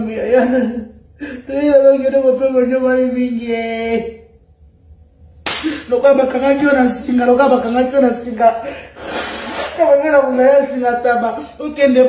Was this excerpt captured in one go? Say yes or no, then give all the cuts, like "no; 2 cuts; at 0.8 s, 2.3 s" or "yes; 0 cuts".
yes; 0 cuts